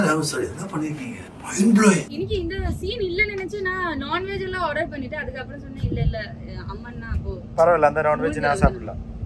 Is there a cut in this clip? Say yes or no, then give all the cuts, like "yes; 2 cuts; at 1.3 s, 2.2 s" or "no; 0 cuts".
yes; 1 cut; at 2.1 s